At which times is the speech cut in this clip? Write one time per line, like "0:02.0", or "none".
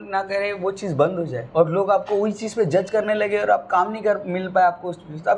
0:01.4

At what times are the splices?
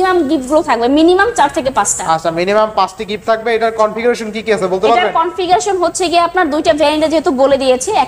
none

